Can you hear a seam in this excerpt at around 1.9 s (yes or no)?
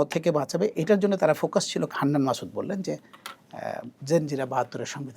yes